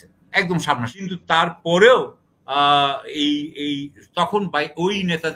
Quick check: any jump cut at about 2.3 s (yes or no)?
no